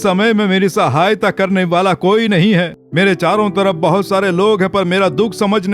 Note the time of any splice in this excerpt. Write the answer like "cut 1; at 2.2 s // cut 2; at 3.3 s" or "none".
cut 1; at 2.8 s